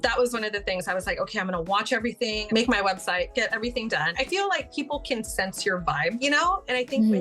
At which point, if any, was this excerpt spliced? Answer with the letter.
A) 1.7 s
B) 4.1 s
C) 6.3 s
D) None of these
B